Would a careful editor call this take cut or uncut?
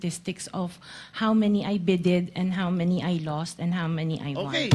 uncut